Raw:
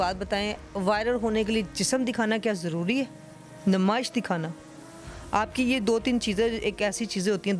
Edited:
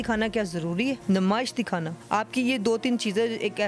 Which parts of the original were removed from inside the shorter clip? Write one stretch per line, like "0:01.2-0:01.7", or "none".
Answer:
0:03.1-0:03.6
0:04.5-0:05.2